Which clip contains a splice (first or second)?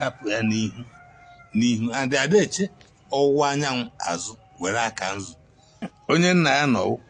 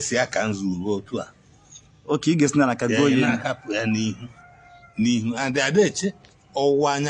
first